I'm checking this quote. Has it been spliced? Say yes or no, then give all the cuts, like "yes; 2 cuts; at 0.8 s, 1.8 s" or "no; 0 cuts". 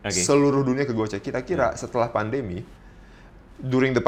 no; 0 cuts